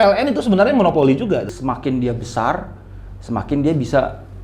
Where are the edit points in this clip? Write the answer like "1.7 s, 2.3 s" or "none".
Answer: 1.5 s